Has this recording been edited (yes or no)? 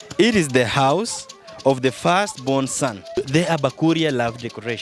yes